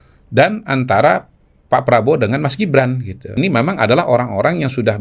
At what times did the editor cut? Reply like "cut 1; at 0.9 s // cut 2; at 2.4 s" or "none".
cut 1; at 3.3 s